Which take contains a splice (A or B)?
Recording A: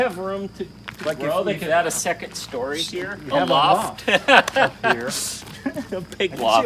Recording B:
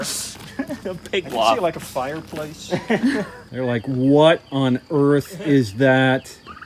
B